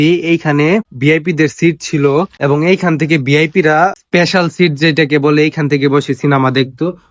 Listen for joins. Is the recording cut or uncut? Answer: cut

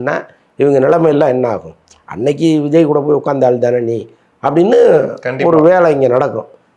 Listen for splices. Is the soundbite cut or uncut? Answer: uncut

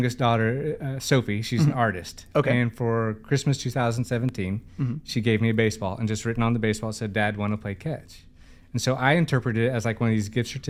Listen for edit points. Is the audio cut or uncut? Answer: uncut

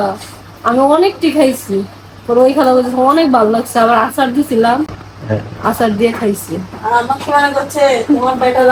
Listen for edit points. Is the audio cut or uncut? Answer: uncut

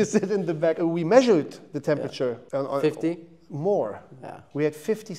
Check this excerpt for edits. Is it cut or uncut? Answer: cut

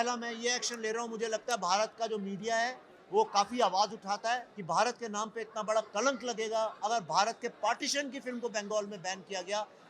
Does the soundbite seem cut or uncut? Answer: cut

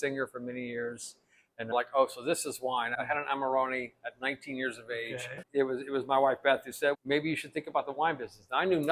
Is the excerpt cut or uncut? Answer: cut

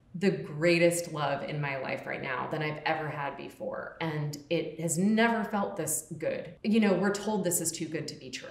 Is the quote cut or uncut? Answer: uncut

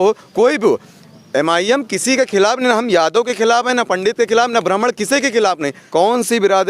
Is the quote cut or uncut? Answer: cut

